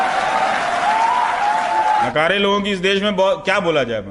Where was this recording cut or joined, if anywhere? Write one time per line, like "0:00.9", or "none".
0:02.0